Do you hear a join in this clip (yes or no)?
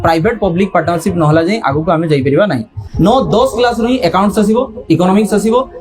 yes